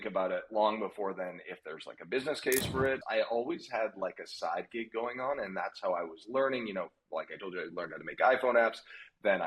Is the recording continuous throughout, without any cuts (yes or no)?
no